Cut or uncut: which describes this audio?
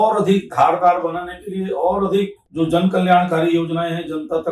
cut